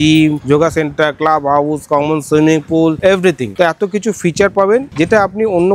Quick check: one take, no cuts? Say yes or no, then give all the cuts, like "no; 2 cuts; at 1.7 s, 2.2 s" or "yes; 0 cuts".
no; 1 cut; at 3.5 s